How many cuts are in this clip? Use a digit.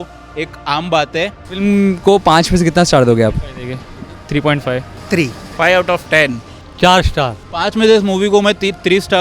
2